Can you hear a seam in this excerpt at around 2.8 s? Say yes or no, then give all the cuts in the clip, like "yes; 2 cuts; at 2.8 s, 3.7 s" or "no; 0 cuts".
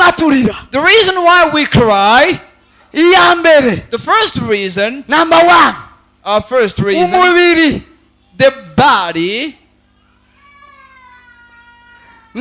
yes; 1 cut; at 2.8 s